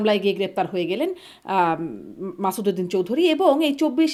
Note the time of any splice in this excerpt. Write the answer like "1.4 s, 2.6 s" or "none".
none